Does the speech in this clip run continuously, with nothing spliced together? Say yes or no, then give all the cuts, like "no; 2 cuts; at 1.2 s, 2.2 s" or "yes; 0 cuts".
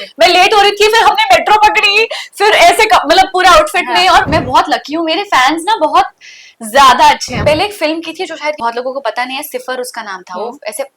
no; 3 cuts; at 4.3 s, 7.3 s, 8.6 s